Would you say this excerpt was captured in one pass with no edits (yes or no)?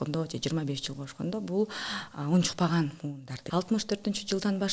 no